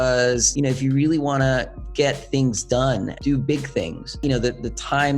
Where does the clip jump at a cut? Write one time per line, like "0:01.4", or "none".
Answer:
0:04.2